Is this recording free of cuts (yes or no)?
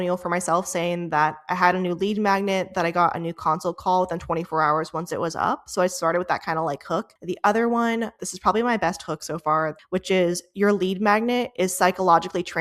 no